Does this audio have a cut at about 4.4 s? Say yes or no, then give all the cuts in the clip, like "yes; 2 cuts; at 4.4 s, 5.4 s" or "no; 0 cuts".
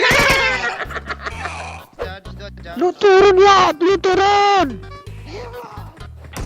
no; 1 cut; at 2.0 s